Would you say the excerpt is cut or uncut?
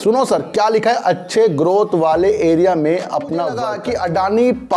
cut